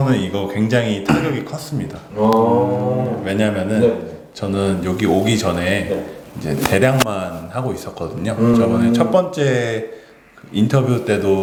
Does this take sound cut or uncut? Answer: uncut